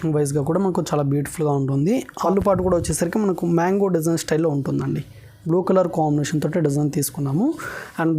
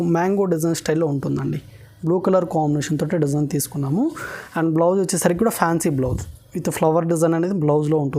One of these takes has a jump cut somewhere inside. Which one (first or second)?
first